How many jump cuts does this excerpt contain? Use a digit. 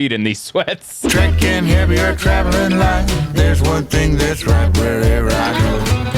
1